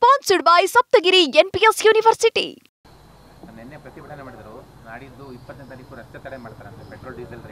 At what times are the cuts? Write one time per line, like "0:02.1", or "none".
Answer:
0:02.7